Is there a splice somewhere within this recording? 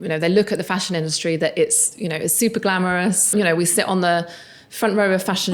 yes; 1 cut; at 3.3 s

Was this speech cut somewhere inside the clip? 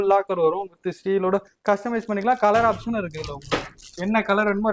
no; 0 cuts

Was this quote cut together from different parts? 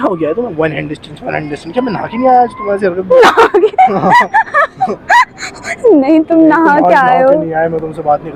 no; 0 cuts

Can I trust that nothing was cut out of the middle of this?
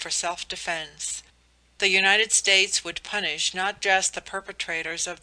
no; 1 cut; at 1.4 s

